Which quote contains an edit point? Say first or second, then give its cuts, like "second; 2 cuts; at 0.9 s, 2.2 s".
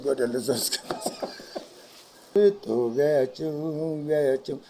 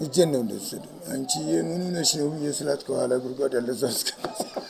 first; 1 cut; at 2.3 s